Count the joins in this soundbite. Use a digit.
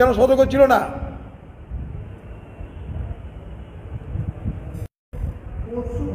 1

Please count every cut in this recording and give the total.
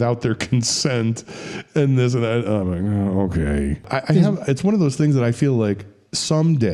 1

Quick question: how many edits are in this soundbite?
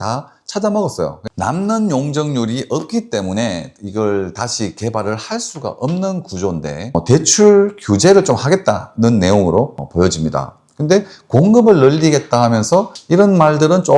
3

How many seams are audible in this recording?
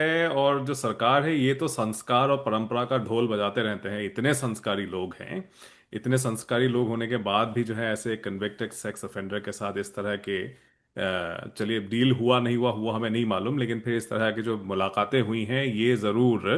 0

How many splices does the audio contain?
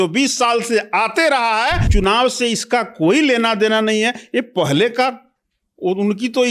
1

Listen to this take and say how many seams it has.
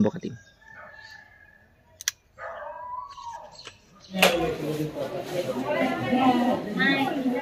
1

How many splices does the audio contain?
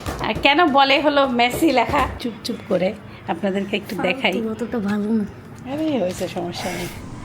1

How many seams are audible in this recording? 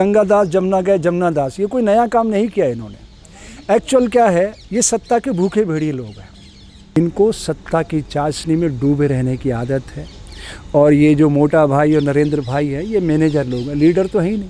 1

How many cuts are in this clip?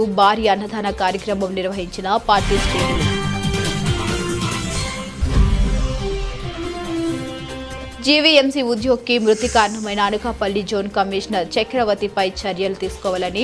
2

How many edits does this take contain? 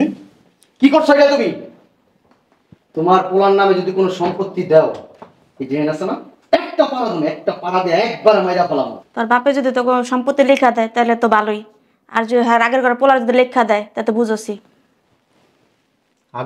1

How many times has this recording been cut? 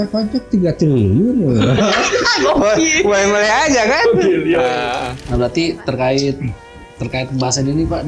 1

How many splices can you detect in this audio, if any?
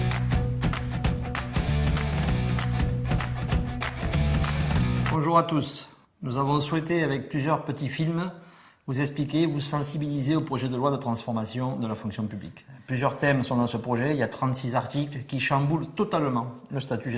1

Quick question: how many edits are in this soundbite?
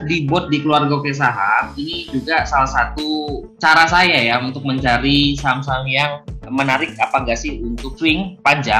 2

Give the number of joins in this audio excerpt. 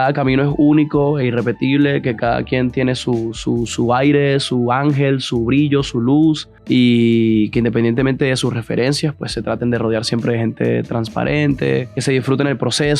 2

